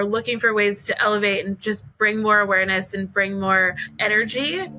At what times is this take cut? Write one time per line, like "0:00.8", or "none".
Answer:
0:03.9